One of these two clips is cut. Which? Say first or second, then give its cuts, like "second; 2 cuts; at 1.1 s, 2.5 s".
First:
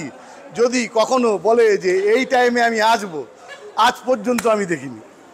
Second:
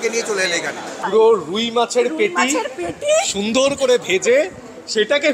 second; 1 cut; at 0.9 s